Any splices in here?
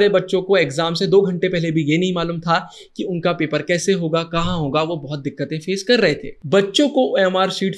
yes; 1 cut; at 6.3 s

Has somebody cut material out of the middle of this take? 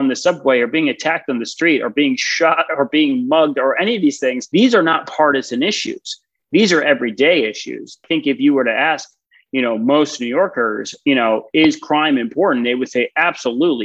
yes; 2 cuts; at 4.4 s, 8.0 s

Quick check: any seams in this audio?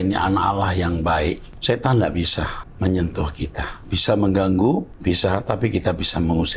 yes; 3 cuts; at 1.5 s, 2.6 s, 4.9 s

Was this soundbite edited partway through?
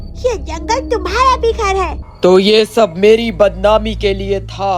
yes; 1 cut; at 2.0 s

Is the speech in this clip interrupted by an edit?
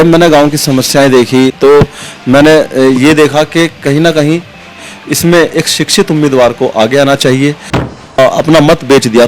yes; 2 cuts; at 1.5 s, 8.2 s

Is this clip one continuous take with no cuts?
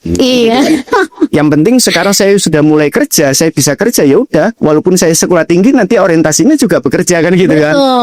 yes; 0 cuts

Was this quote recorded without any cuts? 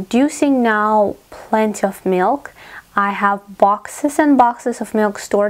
yes; 0 cuts

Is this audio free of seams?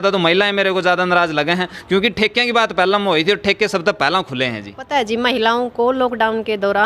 no; 1 cut; at 4.7 s

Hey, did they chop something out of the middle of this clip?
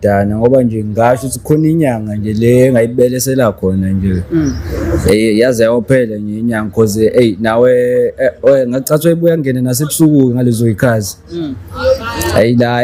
no; 0 cuts

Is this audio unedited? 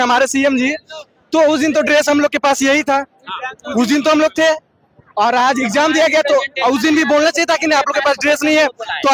yes; 0 cuts

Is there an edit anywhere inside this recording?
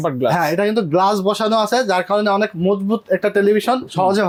no; 0 cuts

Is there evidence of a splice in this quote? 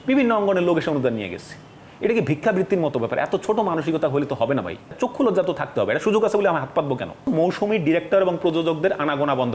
yes; 2 cuts; at 4.9 s, 7.3 s

